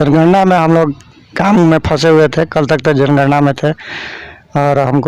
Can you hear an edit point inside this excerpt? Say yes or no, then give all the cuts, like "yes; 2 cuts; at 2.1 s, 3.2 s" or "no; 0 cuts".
no; 0 cuts